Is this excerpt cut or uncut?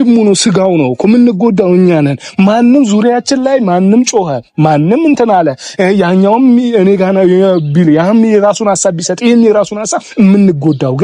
uncut